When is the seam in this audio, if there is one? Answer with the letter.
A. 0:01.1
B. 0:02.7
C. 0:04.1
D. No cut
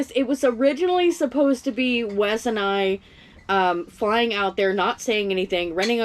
D